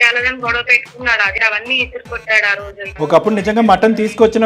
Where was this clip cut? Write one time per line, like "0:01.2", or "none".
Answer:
0:01.4
0:02.9